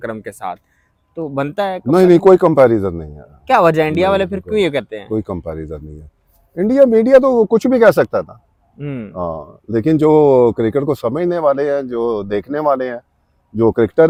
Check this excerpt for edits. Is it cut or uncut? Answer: uncut